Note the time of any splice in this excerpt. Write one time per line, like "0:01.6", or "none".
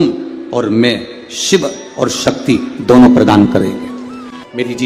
none